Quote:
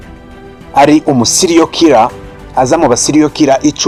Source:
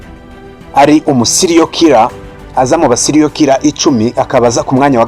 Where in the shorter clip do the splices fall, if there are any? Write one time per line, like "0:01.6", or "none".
none